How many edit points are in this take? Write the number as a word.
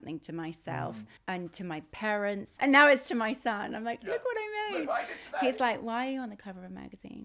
two